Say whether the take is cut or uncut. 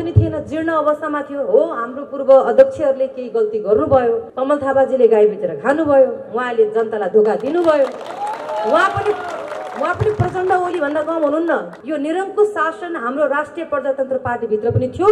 cut